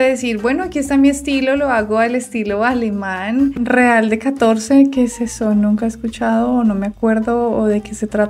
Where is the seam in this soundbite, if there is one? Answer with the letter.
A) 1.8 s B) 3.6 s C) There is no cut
B